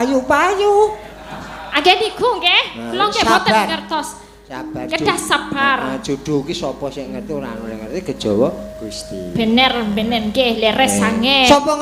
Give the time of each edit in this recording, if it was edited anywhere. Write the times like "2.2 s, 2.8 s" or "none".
none